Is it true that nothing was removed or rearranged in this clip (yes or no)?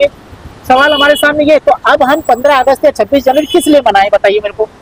yes